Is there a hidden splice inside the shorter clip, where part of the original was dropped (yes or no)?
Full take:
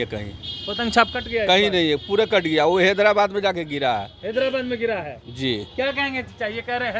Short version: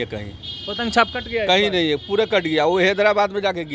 no